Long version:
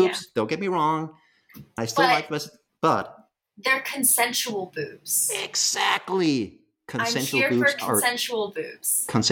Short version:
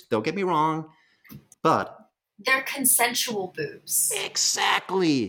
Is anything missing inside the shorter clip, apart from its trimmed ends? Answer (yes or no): yes